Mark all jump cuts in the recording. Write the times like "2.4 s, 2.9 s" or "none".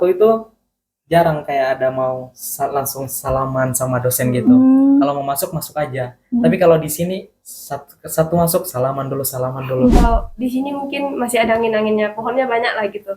10.0 s